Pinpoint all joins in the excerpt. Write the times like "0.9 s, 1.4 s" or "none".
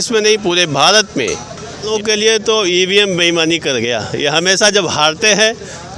1.9 s